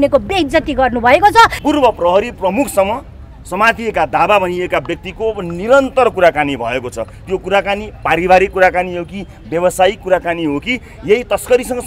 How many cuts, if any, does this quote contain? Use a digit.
1